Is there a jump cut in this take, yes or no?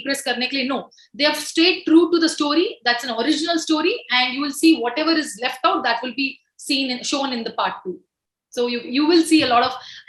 no